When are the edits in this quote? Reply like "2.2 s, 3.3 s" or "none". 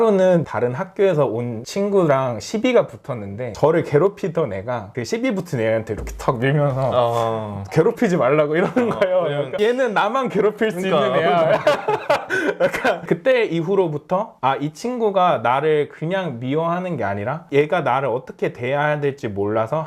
none